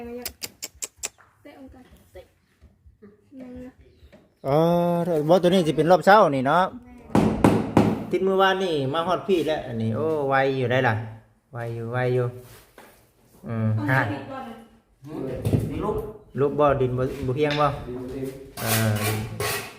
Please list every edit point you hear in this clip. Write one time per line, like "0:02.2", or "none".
0:07.1